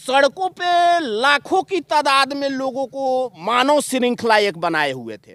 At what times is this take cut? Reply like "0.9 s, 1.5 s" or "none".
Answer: none